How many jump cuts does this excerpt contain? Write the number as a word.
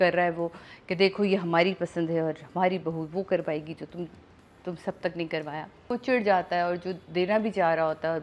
one